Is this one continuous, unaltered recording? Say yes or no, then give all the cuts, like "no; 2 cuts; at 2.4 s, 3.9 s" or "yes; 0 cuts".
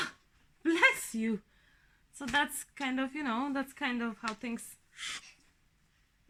yes; 0 cuts